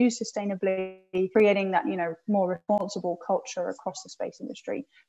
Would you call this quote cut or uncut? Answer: cut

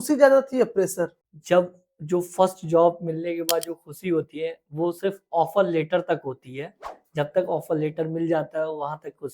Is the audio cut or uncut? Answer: cut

